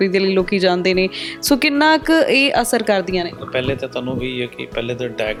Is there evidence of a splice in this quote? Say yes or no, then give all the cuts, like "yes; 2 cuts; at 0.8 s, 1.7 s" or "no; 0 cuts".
no; 0 cuts